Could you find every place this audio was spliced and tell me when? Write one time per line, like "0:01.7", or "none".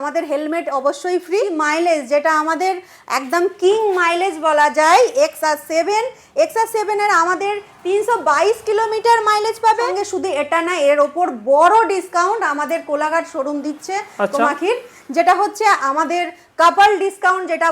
0:01.5
0:10.0